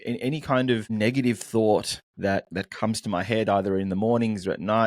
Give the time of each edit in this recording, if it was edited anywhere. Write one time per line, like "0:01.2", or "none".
0:00.9
0:02.0